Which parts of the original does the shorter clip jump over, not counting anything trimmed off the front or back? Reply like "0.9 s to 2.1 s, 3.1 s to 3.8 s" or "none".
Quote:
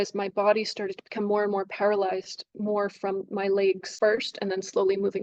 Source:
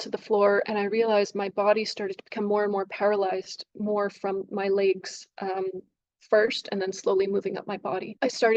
5.1 s to 6.2 s